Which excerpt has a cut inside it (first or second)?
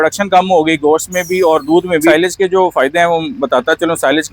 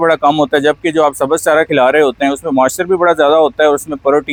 first